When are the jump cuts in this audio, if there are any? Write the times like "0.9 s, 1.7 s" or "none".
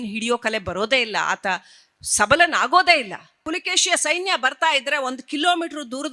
3.4 s